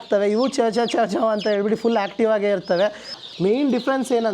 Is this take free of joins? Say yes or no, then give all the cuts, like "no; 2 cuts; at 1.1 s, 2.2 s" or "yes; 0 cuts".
no; 1 cut; at 3.1 s